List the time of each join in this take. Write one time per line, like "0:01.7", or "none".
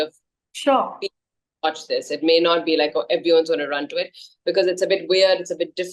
none